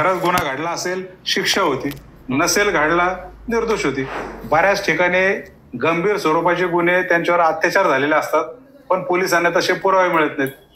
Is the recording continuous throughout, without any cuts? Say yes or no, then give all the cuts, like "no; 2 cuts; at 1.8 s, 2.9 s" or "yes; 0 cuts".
no; 1 cut; at 4.2 s